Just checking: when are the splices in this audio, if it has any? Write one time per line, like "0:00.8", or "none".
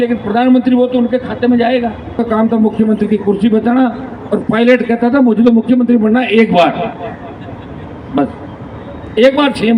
0:02.2

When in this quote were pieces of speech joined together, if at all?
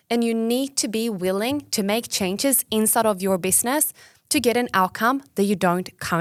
none

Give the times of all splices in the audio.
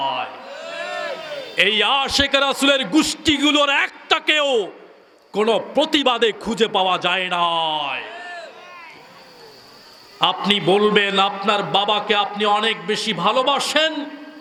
none

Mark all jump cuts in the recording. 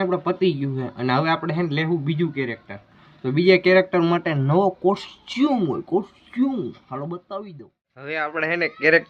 0:08.2

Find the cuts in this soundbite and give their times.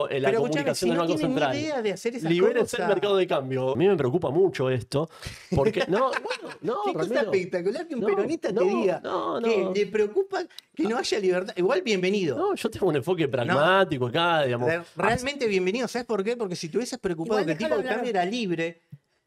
0:03.8

